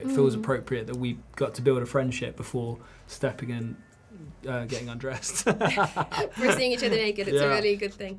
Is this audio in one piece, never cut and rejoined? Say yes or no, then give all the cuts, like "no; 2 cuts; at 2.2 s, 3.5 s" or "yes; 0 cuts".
yes; 0 cuts